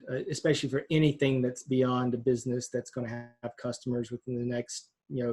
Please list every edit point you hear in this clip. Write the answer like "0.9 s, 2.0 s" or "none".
none